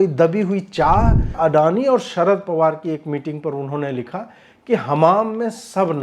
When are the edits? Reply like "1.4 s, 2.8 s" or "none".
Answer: 1.4 s